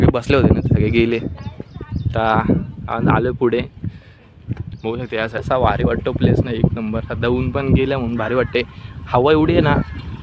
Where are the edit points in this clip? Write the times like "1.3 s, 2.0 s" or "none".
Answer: 5.4 s